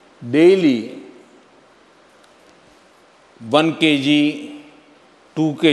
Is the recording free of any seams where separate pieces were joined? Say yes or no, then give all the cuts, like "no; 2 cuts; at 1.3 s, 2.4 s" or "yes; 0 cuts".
yes; 0 cuts